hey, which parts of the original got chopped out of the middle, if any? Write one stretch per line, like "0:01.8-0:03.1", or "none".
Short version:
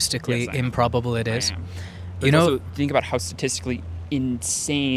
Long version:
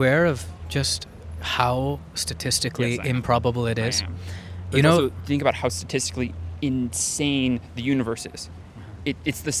none